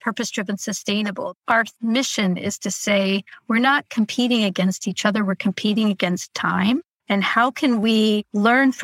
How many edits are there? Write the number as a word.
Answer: two